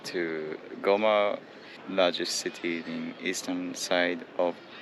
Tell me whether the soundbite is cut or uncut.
uncut